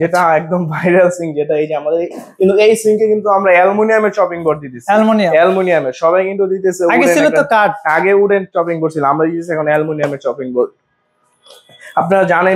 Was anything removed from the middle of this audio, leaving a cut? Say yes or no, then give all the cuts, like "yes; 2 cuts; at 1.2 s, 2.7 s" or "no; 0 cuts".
no; 0 cuts